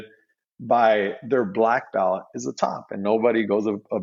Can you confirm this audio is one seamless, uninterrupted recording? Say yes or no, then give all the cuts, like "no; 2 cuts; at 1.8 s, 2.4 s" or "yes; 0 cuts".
yes; 0 cuts